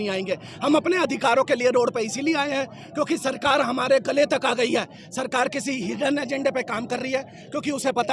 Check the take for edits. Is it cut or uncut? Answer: uncut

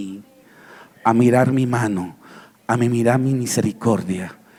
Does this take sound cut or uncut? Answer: uncut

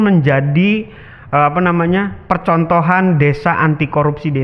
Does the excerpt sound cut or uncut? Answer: uncut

